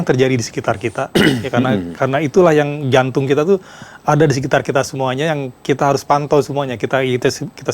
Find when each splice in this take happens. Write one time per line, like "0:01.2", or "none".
none